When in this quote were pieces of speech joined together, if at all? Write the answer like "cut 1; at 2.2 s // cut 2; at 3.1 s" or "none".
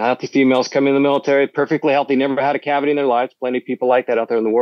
none